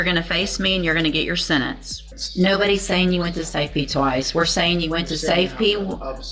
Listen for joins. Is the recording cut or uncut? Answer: cut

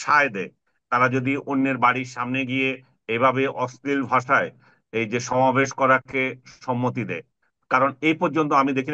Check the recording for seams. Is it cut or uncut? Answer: uncut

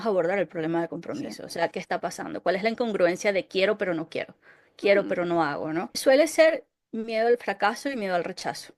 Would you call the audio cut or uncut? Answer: cut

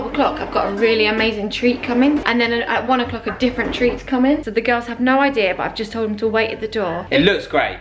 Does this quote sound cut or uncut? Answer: cut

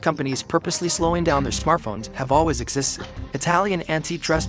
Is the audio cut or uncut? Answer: uncut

